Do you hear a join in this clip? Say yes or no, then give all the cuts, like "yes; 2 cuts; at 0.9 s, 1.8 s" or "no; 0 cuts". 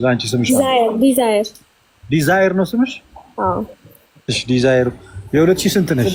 no; 0 cuts